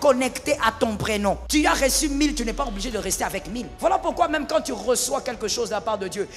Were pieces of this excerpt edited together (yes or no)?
yes